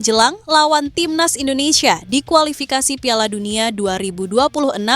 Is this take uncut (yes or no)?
yes